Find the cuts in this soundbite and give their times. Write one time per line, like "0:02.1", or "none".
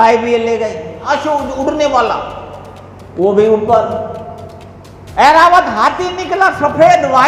0:01.0